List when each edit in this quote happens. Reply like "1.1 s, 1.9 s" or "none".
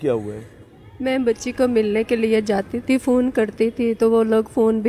none